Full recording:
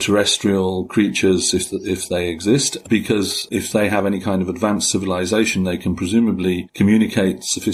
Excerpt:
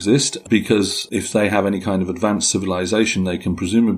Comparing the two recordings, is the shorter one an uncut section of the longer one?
yes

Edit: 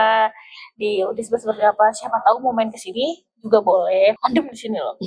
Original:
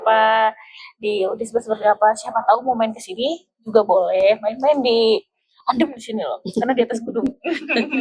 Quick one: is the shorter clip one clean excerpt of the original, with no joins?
no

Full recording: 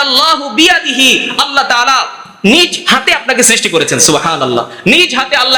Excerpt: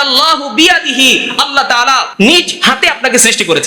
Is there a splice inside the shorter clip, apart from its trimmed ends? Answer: yes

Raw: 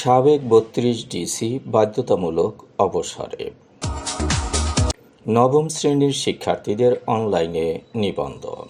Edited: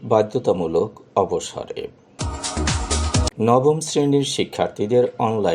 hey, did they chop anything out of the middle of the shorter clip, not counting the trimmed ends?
yes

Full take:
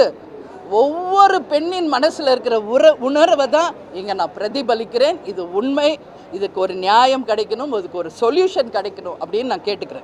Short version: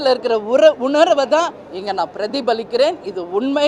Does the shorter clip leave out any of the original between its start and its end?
no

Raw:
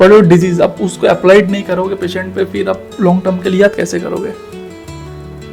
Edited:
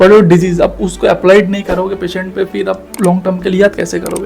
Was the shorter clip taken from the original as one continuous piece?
yes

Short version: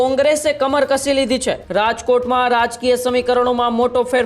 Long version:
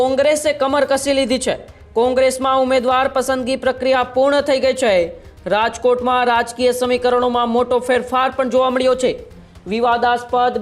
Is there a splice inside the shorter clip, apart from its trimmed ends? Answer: yes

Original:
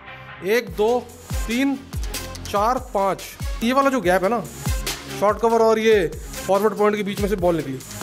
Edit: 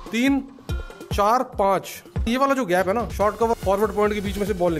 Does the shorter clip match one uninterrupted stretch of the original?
no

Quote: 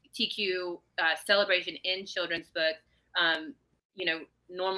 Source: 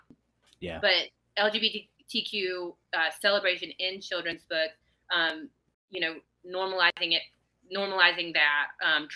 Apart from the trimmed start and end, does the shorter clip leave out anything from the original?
no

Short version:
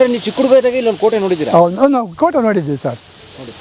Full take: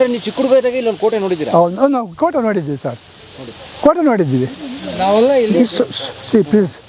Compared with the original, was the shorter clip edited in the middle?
no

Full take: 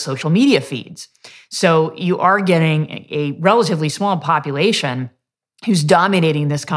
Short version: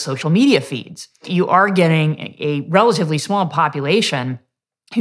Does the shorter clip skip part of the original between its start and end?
yes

